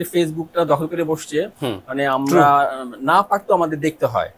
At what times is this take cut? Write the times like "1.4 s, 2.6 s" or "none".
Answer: none